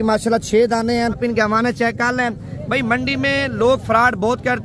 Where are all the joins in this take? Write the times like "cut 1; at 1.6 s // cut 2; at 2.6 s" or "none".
cut 1; at 1.2 s